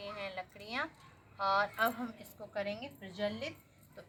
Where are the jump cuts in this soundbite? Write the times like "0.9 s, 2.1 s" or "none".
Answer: none